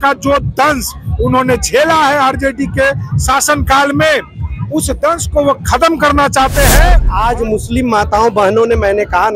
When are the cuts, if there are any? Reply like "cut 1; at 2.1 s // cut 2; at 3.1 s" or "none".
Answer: cut 1; at 7.0 s